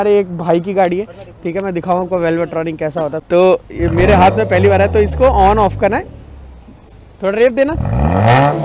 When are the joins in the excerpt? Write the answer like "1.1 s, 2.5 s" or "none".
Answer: 3.2 s